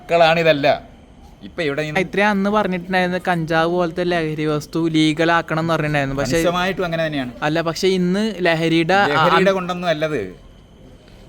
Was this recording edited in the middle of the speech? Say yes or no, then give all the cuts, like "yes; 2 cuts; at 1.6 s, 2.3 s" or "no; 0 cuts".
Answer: yes; 1 cut; at 2.0 s